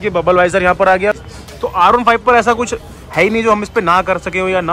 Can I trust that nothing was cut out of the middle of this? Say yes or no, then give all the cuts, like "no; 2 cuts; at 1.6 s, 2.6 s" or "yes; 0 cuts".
no; 1 cut; at 1.2 s